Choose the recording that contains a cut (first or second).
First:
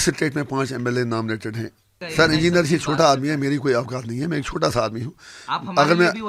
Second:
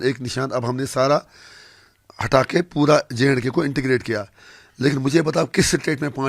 first